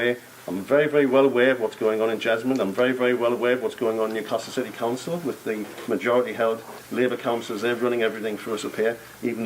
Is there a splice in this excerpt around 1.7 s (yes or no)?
yes